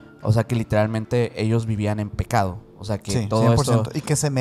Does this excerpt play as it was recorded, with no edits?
yes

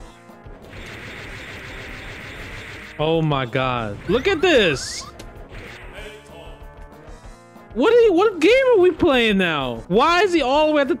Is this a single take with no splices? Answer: no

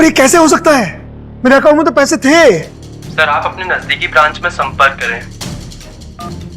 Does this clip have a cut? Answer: yes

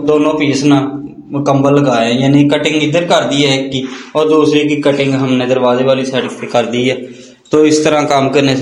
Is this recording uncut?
yes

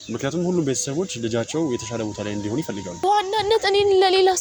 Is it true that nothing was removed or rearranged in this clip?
no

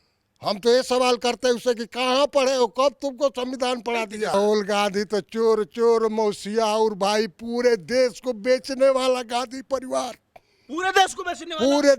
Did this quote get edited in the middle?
yes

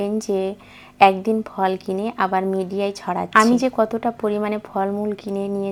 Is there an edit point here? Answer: no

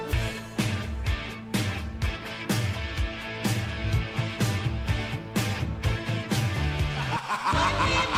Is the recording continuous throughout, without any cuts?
yes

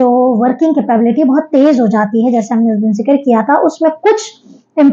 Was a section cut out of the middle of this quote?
no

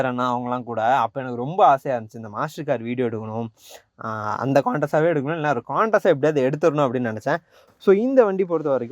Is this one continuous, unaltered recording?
no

